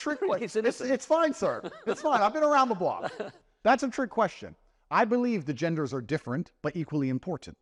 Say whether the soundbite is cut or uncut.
uncut